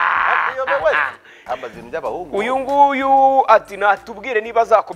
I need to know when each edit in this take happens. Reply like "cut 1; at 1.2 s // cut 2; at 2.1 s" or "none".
cut 1; at 1.4 s